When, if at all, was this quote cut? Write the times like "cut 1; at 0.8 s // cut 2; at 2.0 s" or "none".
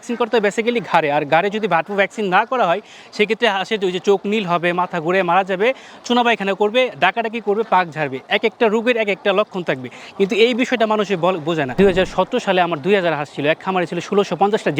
cut 1; at 11.8 s